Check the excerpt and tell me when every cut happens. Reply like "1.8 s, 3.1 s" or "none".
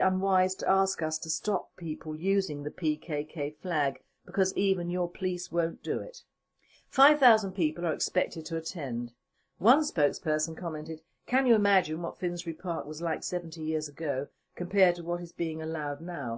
9.0 s